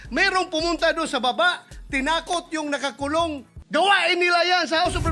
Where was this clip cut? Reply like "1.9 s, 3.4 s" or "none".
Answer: 3.5 s